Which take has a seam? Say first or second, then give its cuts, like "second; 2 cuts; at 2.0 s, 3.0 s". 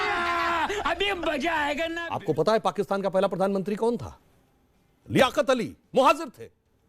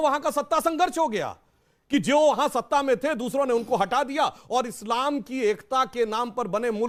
first; 1 cut; at 2.0 s